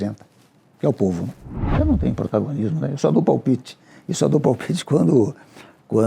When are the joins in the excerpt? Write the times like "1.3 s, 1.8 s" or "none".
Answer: 1.7 s